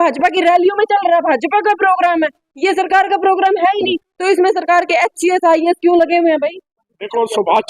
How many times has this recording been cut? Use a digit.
1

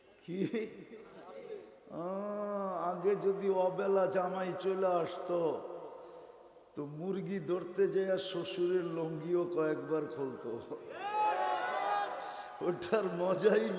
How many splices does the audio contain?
0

